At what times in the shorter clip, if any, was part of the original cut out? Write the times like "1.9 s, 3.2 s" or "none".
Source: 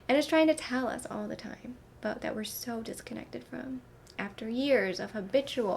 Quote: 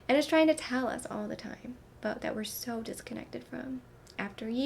none